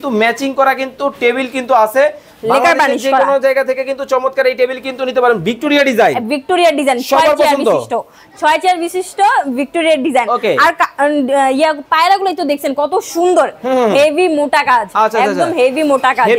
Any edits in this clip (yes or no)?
no